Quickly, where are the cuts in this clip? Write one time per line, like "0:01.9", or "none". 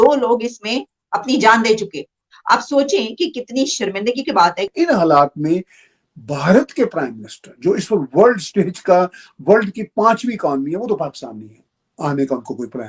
0:04.7